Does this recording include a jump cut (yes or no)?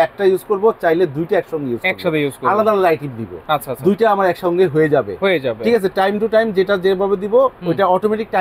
no